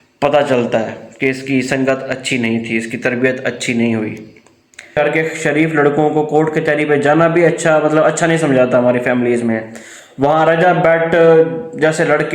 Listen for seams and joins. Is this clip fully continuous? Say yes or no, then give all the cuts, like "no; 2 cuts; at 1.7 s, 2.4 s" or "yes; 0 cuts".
no; 1 cut; at 5.0 s